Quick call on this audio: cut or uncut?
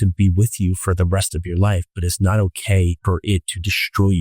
cut